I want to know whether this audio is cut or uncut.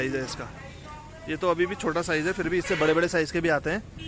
uncut